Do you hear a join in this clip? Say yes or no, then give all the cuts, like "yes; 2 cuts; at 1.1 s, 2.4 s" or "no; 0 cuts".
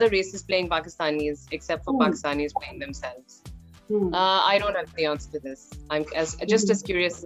no; 0 cuts